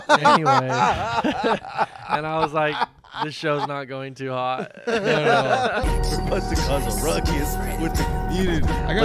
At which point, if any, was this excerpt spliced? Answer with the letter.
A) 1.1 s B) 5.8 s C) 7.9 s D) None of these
B